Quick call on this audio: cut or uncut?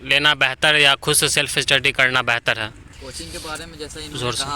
cut